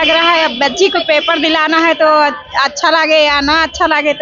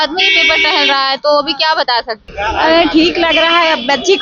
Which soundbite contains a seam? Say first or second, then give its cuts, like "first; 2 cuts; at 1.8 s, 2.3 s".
second; 1 cut; at 2.3 s